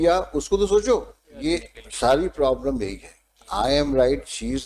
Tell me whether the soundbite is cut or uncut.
cut